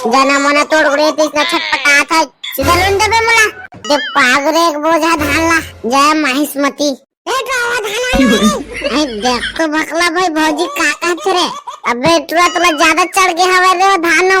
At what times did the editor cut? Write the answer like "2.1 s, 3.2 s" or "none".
3.7 s